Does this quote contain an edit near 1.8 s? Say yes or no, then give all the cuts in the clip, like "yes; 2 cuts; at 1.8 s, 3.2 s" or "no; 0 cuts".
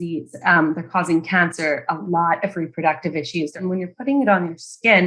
no; 1 cut; at 3.5 s